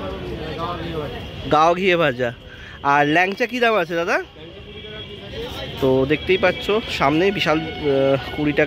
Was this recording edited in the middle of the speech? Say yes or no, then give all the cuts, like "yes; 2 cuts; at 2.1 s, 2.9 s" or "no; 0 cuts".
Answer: no; 0 cuts